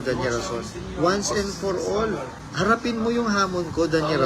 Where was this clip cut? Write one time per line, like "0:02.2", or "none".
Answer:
0:02.4